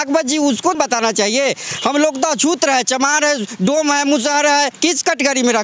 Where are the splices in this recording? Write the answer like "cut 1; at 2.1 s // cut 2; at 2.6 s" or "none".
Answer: cut 1; at 0.7 s // cut 2; at 4.7 s